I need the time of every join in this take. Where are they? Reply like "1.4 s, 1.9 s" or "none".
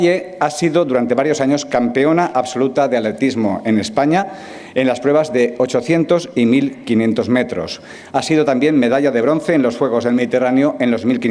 3.0 s